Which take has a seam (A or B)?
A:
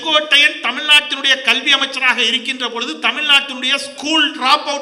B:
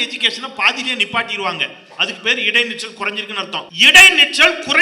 B